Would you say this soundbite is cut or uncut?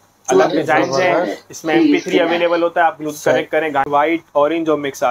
cut